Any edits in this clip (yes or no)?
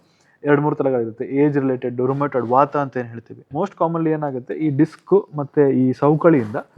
yes